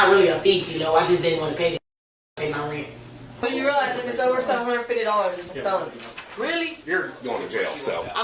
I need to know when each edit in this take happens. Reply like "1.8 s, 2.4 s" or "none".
3.4 s, 6.8 s